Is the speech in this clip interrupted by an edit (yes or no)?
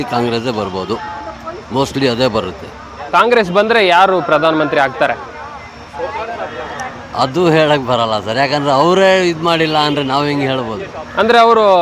no